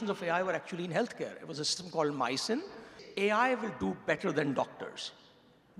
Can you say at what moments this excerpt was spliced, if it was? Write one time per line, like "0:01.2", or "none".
0:03.0